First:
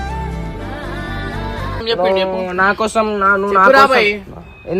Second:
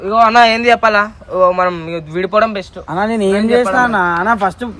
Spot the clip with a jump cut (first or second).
first